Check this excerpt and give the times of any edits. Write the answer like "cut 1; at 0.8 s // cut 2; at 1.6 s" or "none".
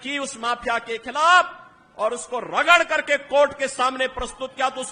none